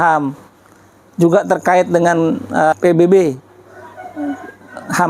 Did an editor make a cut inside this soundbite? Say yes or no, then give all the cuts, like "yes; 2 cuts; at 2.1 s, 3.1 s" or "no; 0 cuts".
yes; 1 cut; at 2.7 s